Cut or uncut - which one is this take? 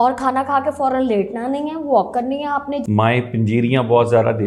cut